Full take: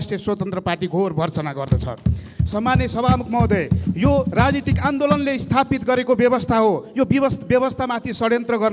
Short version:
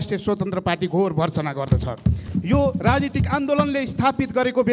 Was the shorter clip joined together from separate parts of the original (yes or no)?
yes